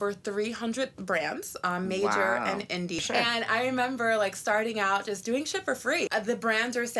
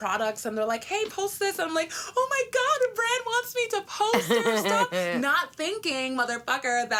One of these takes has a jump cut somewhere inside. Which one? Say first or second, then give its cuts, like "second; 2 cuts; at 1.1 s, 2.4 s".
first; 2 cuts; at 3.0 s, 6.1 s